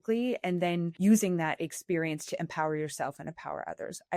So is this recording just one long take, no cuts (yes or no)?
no